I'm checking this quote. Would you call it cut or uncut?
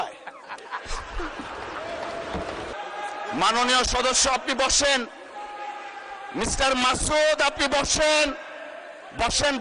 cut